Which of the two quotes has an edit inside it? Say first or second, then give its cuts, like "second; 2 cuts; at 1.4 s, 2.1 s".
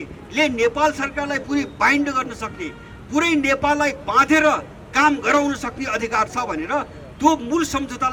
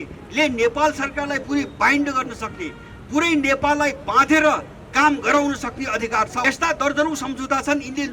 second; 1 cut; at 6.4 s